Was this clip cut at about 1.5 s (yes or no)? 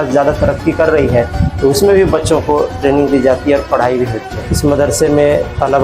no